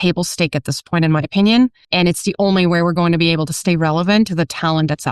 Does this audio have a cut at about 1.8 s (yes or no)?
yes